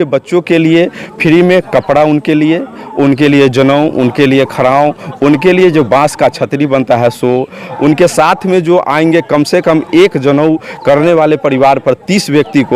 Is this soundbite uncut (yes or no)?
no